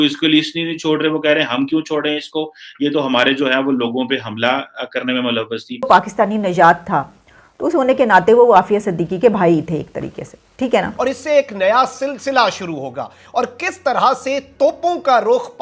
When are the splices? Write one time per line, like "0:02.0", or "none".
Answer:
0:05.9
0:10.9